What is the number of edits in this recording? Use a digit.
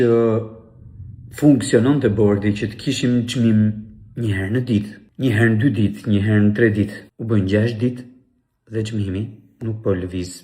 2